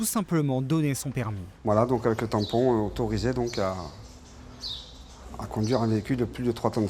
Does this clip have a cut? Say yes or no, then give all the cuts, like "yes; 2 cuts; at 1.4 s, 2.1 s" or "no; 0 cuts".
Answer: yes; 1 cut; at 1.4 s